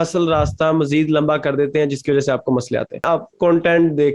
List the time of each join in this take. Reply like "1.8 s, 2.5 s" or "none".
3.1 s